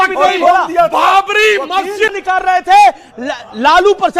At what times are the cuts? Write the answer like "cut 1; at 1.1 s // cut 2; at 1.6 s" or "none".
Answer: cut 1; at 2.2 s